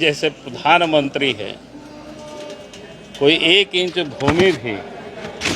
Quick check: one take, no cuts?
yes; 0 cuts

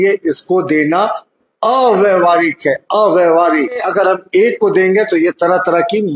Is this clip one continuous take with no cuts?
no; 1 cut; at 3.9 s

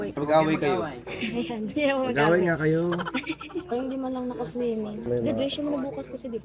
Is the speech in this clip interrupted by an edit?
no; 0 cuts

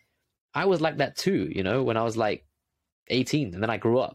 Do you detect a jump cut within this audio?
no; 0 cuts

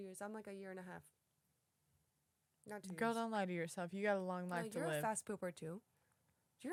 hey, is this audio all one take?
yes; 0 cuts

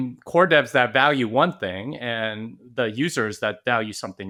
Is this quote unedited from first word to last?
yes; 0 cuts

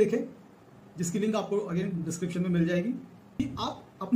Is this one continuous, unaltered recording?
no; 1 cut; at 3.2 s

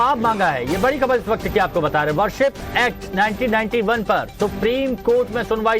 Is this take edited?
yes; 1 cut; at 1.2 s

